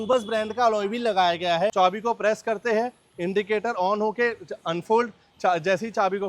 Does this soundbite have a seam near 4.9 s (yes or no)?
no